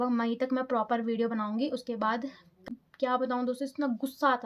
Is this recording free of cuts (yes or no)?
no